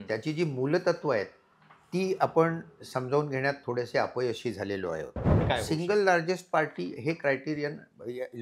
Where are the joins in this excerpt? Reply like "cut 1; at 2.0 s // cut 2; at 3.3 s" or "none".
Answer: cut 1; at 5.4 s